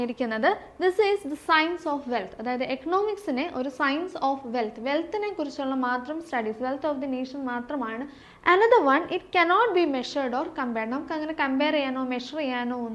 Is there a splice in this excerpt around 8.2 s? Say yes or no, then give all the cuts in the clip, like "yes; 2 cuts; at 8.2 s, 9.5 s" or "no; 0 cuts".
yes; 1 cut; at 8.2 s